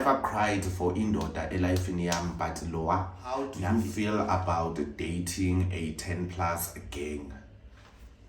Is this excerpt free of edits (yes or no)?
no